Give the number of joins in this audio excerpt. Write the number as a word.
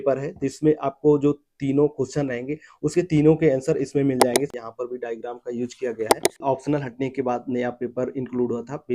two